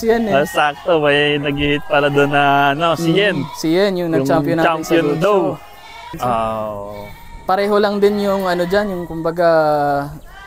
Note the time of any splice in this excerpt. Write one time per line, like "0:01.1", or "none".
0:06.1